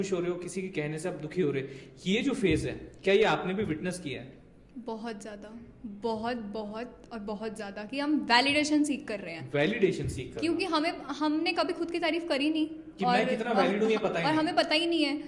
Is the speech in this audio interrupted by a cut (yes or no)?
no